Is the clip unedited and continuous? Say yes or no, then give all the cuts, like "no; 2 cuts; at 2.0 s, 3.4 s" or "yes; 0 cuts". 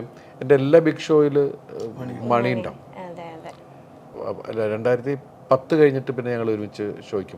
no; 1 cut; at 4.2 s